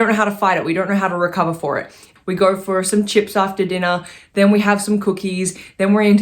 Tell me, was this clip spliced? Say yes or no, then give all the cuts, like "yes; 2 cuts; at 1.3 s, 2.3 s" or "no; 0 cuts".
yes; 1 cut; at 2.0 s